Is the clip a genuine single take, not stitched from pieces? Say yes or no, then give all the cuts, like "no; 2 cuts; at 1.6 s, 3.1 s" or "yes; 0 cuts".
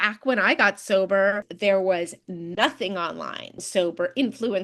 no; 2 cuts; at 1.5 s, 3.6 s